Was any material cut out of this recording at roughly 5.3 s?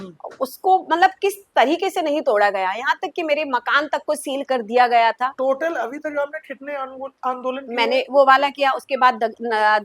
yes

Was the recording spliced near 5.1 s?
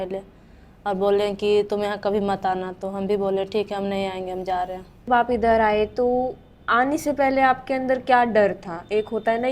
yes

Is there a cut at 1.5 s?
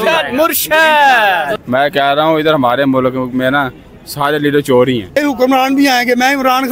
yes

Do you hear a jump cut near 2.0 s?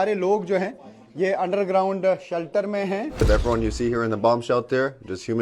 no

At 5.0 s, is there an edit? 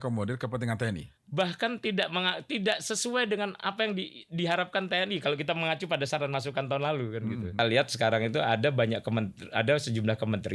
no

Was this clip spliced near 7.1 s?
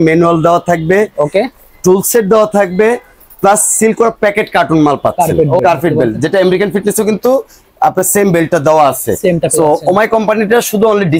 no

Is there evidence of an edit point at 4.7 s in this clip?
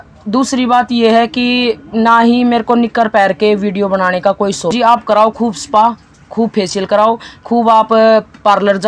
yes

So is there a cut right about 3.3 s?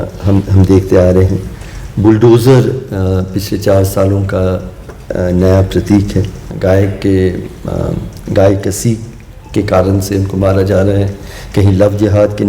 no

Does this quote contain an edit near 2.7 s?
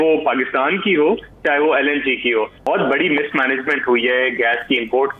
yes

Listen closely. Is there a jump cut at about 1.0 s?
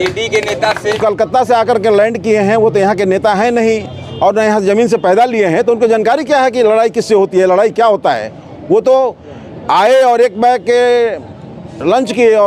yes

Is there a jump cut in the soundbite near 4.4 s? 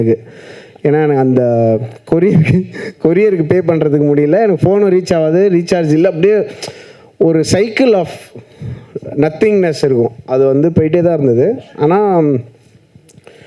no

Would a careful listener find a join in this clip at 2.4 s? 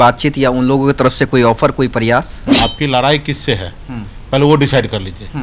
yes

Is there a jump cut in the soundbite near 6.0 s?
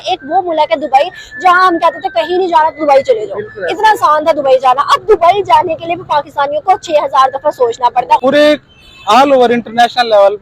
no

